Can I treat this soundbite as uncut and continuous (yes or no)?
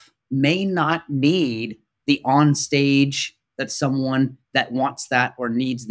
yes